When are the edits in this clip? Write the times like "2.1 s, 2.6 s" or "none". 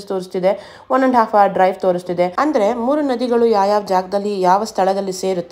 2.3 s